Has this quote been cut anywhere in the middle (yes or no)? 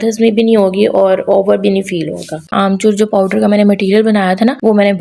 yes